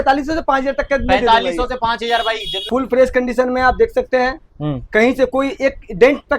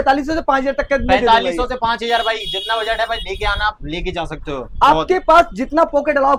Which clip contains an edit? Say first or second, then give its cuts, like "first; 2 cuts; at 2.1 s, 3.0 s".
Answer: first; 1 cut; at 2.7 s